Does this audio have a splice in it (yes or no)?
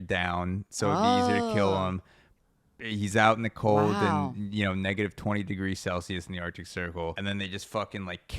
yes